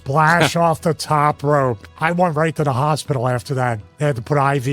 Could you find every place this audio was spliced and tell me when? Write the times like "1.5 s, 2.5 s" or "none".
1.9 s